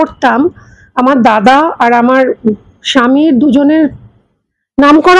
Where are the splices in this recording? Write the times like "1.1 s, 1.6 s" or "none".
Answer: none